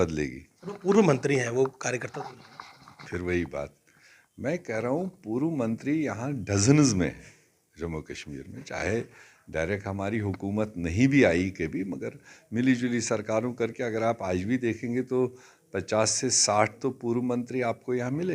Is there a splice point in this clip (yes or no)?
no